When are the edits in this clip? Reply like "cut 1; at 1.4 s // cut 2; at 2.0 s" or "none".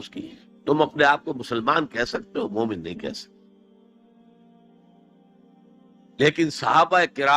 cut 1; at 3.1 s // cut 2; at 5.9 s